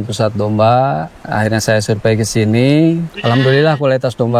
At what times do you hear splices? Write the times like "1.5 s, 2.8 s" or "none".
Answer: 1.2 s, 3.1 s